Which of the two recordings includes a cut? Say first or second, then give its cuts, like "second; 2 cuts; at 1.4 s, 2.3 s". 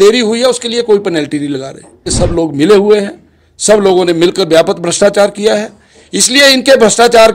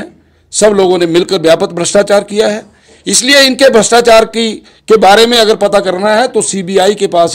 first; 1 cut; at 2.0 s